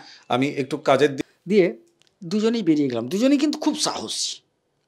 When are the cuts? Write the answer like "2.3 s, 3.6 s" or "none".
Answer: 1.2 s